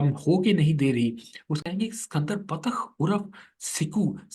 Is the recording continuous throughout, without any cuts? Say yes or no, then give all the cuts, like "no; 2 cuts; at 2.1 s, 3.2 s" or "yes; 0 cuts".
no; 1 cut; at 1.6 s